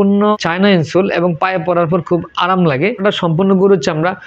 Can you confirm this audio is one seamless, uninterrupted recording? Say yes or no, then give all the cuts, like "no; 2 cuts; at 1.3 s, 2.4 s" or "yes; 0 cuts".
no; 1 cut; at 3.0 s